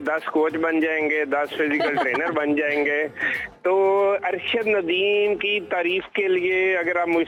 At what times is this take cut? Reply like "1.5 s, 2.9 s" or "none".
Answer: none